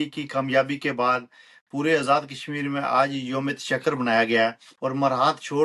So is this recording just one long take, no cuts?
no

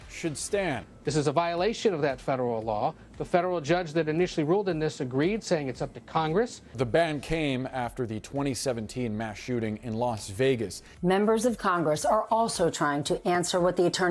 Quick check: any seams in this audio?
yes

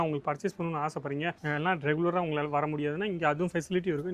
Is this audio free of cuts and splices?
no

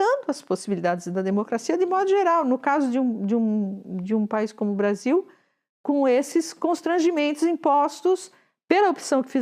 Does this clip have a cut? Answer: no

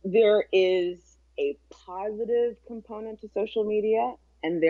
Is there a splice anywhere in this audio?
no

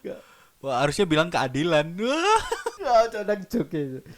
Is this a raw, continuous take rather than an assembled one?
no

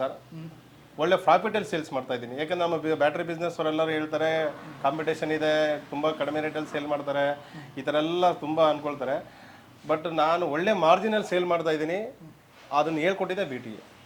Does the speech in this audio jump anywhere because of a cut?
no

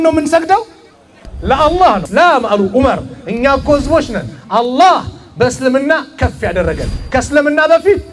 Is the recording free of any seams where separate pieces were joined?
no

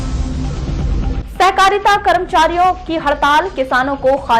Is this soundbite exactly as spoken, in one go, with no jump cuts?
yes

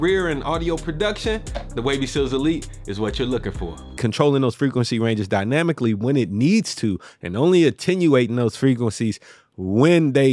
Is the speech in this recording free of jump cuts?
no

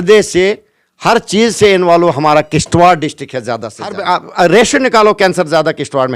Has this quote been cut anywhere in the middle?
yes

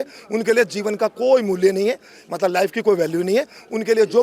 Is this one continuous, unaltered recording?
yes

